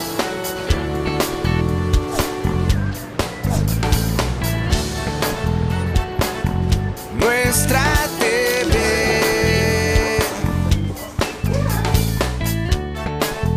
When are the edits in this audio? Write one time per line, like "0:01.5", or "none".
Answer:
none